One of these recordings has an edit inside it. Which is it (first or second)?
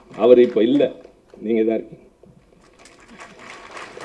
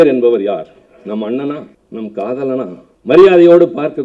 second